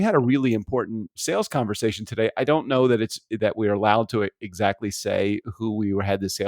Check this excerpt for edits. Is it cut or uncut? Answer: cut